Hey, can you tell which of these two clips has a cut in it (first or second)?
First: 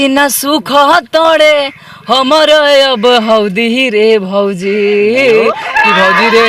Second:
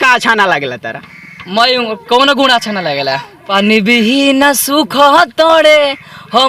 second